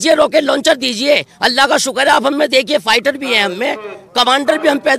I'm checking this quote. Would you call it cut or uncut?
uncut